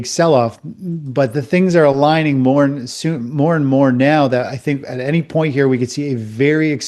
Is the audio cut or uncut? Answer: uncut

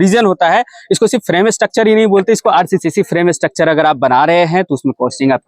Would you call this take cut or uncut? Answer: cut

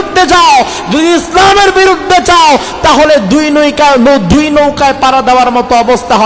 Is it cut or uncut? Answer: uncut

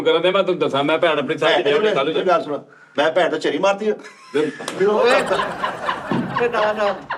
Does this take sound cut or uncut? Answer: uncut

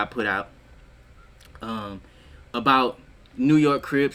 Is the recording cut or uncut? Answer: uncut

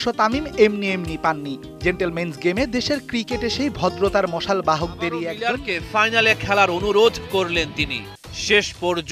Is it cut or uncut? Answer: cut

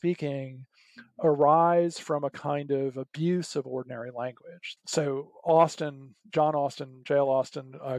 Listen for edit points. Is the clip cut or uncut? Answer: cut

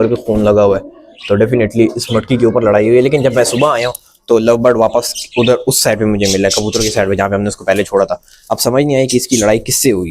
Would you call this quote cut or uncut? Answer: uncut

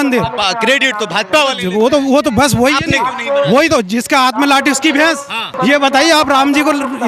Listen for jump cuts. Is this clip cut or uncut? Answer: cut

